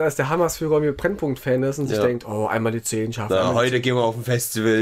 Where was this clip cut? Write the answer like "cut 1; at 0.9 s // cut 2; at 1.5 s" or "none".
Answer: cut 1; at 1.0 s